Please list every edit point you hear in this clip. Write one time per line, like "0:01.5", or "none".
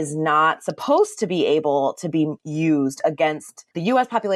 none